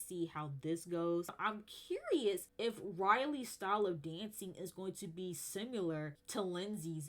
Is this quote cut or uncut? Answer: cut